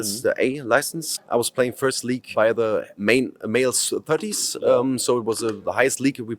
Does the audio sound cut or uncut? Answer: cut